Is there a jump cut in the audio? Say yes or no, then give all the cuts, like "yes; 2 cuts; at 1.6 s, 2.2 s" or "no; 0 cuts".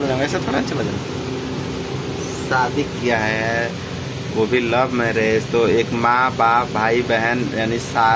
no; 0 cuts